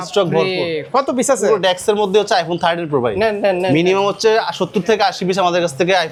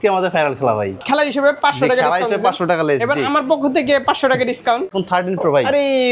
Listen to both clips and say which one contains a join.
second; 2 cuts; at 1.0 s, 4.9 s

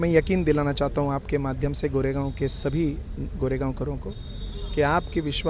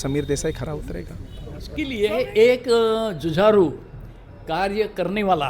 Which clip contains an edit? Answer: second; 1 cut; at 1.9 s

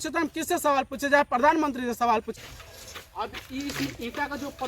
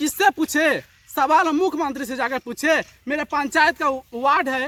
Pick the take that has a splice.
first; 1 cut; at 2.3 s

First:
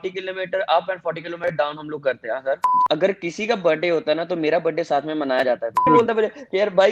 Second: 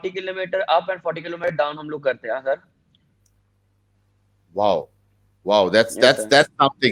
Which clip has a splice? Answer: first; 2 cuts; at 2.7 s, 5.9 s

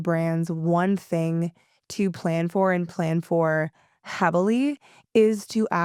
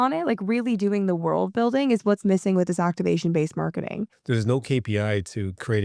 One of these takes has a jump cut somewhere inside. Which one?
second; 1 cut; at 4.1 s

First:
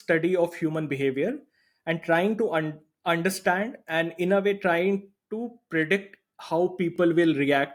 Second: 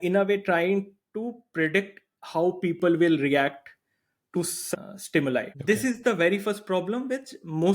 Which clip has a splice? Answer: second; 2 cuts; at 4.7 s, 5.5 s

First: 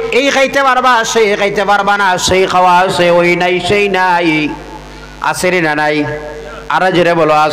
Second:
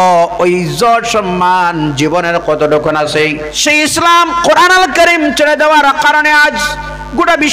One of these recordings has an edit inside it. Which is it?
second; 1 cut; at 3.5 s

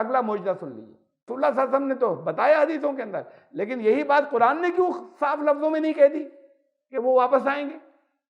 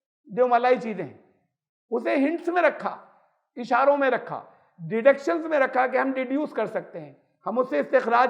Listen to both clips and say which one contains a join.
first; 1 cut; at 1.3 s

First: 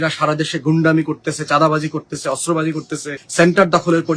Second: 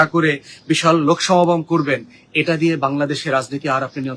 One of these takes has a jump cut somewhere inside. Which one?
first; 1 cut; at 3.2 s

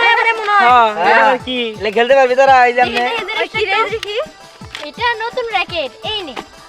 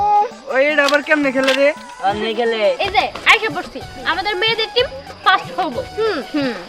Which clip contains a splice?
second; 1 cut; at 2.8 s

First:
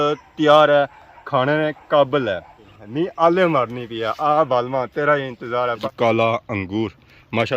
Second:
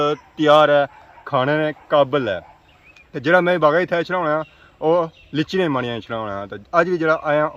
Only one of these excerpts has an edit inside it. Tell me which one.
first; 2 cuts; at 2.8 s, 5.8 s

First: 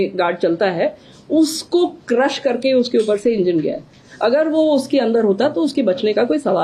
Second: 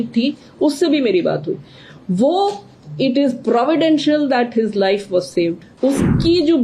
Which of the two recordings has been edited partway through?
second; 1 cut; at 5.7 s

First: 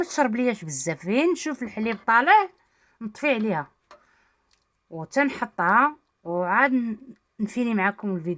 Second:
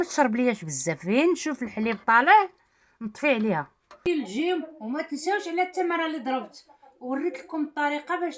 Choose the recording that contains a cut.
second; 1 cut; at 4.0 s

